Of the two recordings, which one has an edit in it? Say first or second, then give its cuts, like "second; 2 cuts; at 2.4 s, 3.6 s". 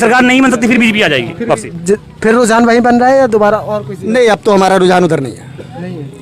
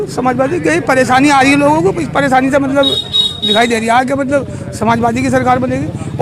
first; 1 cut; at 1.7 s